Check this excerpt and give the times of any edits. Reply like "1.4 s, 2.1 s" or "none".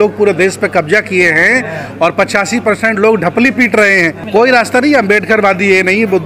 4.2 s

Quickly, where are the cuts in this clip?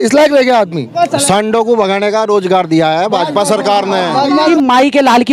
0.9 s, 4.3 s

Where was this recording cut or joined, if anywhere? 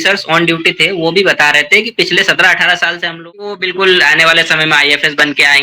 3.0 s

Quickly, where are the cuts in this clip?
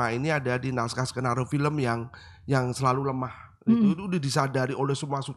none

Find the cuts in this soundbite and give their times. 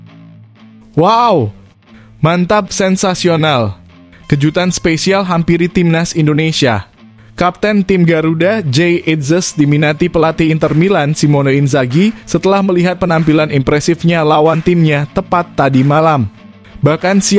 0.9 s

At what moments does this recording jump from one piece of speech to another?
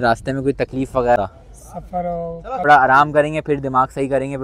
1.2 s, 2.6 s

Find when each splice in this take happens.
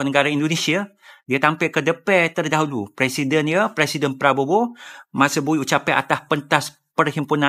none

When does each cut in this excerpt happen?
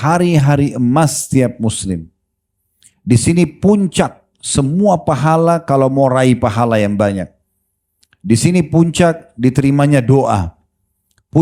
none

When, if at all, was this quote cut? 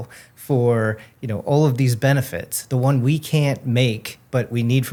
none

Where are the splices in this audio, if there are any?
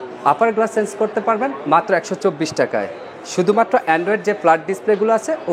none

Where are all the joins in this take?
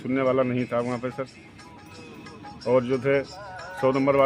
none

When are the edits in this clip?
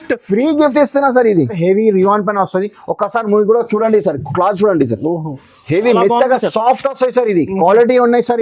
1.6 s

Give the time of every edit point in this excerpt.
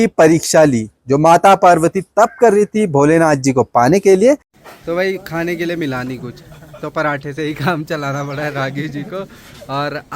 4.5 s

